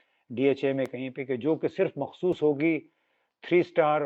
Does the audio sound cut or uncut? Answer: uncut